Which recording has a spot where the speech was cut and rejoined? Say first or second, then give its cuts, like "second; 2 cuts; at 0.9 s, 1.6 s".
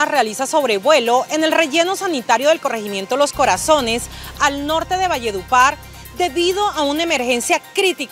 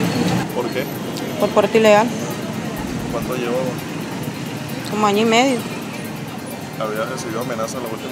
second; 1 cut; at 6.3 s